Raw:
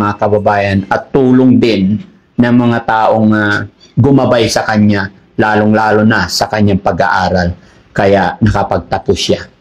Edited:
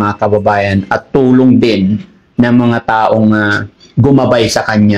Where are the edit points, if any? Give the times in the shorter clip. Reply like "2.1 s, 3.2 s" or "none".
none